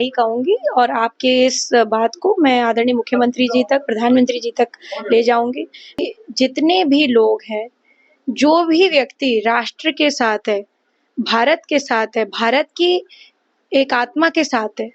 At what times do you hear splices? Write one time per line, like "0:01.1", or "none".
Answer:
0:06.0